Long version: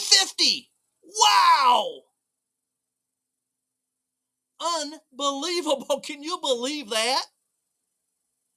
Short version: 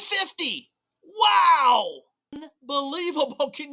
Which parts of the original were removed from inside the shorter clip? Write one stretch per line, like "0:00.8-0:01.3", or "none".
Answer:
0:02.5-0:05.0